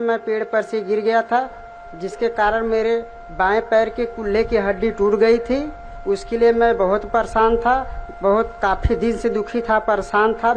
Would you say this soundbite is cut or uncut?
uncut